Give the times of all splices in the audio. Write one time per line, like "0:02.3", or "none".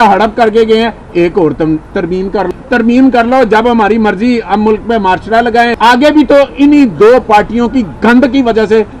0:02.5
0:05.7